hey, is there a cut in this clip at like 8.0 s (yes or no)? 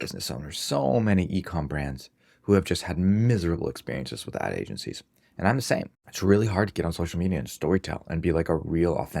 no